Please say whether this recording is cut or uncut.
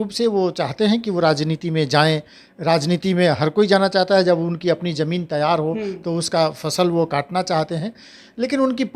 uncut